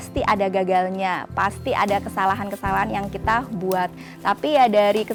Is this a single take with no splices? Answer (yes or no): yes